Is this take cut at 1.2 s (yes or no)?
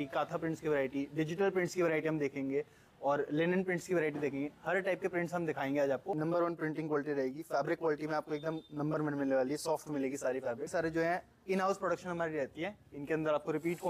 no